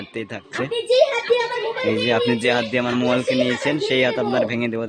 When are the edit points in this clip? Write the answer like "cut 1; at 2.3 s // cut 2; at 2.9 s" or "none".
none